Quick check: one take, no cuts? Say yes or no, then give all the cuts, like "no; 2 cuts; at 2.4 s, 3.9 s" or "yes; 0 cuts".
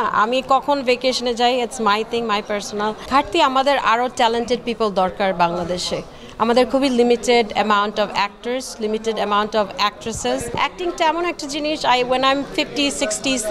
no; 2 cuts; at 3.0 s, 10.5 s